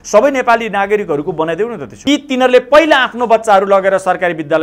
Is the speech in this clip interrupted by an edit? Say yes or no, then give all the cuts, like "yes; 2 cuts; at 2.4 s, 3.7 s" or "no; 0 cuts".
yes; 1 cut; at 1.9 s